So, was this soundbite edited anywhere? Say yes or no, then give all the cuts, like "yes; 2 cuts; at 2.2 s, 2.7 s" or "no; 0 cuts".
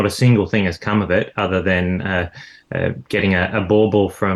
no; 0 cuts